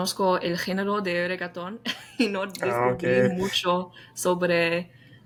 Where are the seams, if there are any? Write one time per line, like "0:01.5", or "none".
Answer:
none